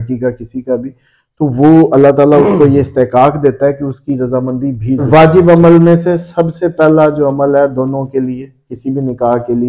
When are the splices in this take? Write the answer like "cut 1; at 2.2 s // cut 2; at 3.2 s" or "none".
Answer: cut 1; at 5.1 s